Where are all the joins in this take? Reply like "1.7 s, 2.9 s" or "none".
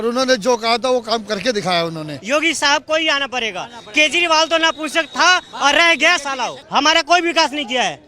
2.2 s, 6.6 s